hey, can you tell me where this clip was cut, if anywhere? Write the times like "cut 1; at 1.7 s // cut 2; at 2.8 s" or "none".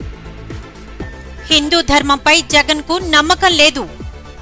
cut 1; at 1.1 s